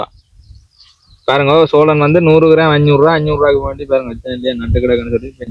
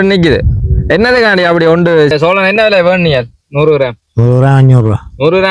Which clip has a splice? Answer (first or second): second